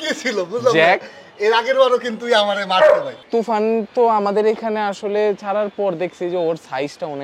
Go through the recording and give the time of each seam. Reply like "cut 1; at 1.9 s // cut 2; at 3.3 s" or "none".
cut 1; at 3.1 s